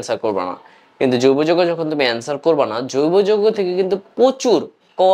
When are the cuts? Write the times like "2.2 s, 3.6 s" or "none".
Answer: none

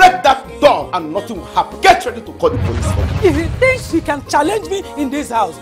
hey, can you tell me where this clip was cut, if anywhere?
1.7 s, 3.0 s

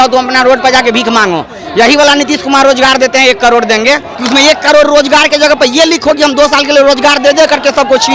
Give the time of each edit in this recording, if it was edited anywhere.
4.1 s

